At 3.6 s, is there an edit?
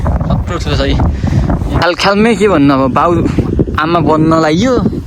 no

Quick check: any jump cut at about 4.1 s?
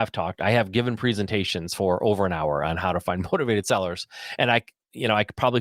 no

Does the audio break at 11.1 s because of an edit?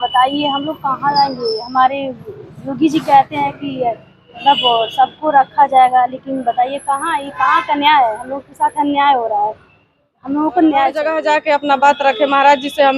yes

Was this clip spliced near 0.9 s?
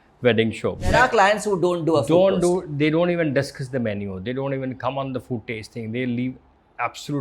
yes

